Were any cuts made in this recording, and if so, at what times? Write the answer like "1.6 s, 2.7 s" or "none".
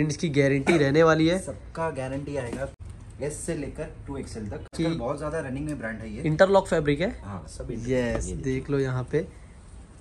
2.7 s, 4.7 s